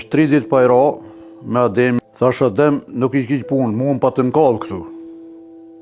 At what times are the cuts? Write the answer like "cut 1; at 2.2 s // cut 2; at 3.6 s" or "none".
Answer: cut 1; at 2.0 s